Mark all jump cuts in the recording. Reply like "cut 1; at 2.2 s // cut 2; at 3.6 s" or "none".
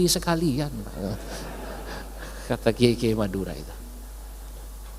none